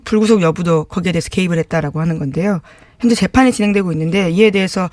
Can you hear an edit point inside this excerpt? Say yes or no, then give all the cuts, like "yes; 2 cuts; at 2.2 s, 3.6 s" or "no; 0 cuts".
yes; 1 cut; at 1.2 s